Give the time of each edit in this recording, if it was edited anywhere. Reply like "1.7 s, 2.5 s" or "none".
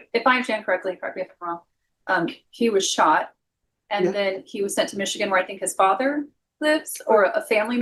none